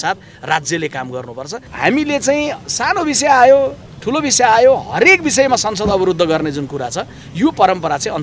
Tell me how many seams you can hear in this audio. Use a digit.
1